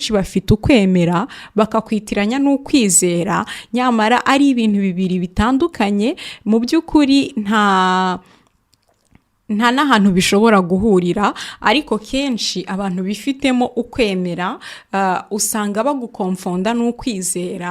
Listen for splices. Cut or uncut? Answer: uncut